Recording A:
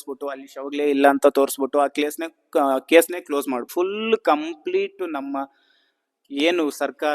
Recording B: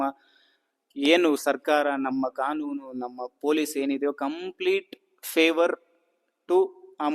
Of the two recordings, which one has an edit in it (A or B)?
A